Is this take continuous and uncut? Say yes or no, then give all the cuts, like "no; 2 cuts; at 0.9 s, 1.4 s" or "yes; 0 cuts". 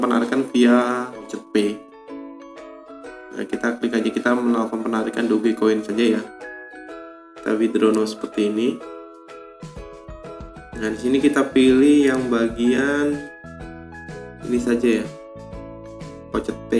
no; 1 cut; at 1.4 s